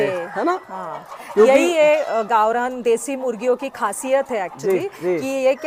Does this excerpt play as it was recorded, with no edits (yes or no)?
yes